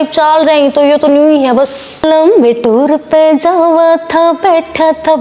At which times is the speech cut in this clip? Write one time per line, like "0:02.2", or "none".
0:02.0